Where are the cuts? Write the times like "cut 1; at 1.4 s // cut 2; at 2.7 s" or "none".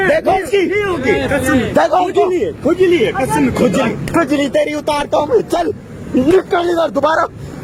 none